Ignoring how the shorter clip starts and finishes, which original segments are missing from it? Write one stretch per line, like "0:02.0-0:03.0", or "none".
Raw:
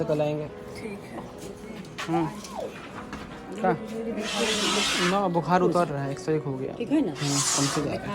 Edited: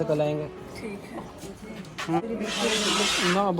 0:02.2-0:04.0